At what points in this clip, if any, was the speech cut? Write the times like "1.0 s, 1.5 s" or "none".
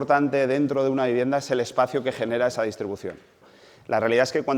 3.5 s

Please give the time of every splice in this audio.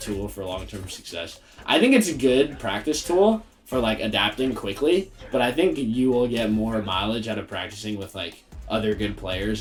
none

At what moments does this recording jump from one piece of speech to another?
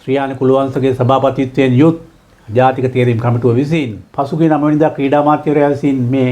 4.0 s

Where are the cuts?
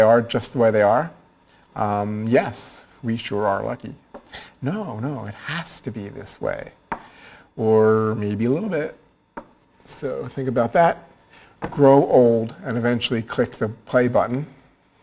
7.0 s

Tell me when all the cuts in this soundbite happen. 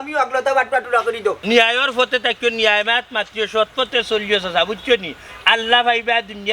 1.4 s

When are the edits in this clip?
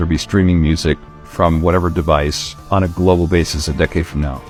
none

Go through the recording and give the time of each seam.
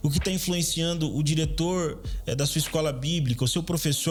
none

